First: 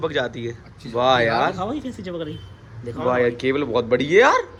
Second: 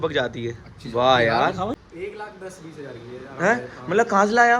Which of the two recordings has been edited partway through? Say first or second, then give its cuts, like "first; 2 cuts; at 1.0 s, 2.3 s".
second; 1 cut; at 1.7 s